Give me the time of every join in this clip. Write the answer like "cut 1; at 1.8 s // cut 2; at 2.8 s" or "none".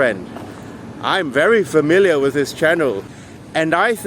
cut 1; at 3.1 s